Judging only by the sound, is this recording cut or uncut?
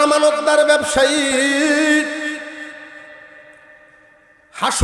uncut